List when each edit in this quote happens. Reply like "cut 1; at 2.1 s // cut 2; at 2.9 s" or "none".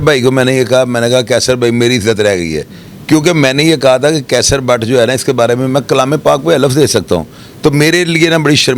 none